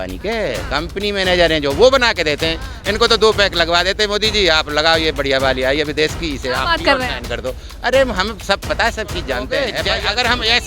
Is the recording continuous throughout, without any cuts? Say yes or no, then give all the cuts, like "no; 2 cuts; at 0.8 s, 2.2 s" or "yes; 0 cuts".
no; 1 cut; at 9.5 s